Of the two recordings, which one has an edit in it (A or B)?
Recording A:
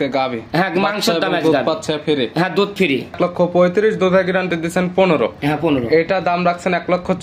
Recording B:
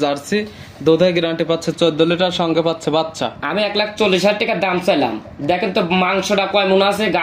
A